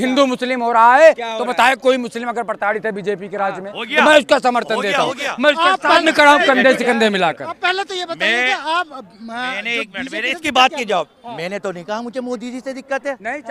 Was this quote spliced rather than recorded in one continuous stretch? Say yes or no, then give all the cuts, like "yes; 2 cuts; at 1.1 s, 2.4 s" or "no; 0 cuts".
no; 0 cuts